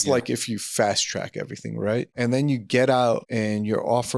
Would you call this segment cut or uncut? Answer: cut